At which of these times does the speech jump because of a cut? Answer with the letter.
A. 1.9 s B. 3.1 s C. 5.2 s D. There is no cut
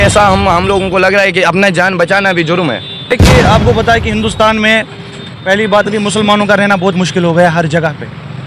B